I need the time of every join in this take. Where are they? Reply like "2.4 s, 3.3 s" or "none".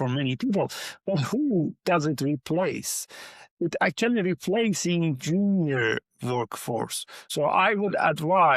7.2 s